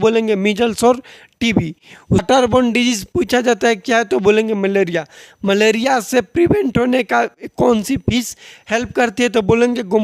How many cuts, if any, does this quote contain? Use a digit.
1